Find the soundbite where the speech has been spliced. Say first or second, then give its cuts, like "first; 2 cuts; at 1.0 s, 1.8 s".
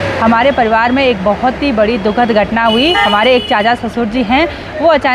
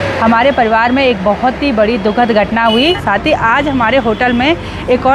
second; 1 cut; at 3.0 s